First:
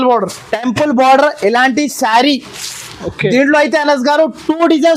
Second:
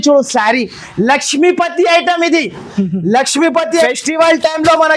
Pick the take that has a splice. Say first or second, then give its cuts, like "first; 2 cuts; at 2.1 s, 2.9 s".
second; 1 cut; at 3.7 s